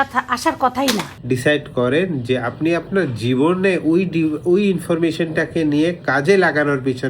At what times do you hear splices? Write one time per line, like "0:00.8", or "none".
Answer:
0:01.1